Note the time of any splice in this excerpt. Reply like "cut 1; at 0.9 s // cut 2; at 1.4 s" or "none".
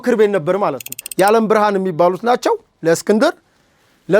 cut 1; at 1.0 s